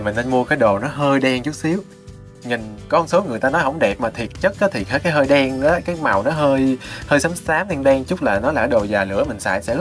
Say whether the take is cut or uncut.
uncut